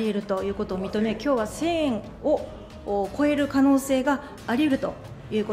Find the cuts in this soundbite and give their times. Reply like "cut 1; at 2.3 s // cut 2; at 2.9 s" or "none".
none